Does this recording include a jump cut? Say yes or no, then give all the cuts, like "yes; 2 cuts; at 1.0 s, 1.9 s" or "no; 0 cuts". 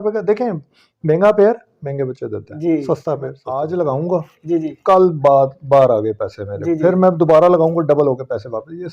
yes; 1 cut; at 3.4 s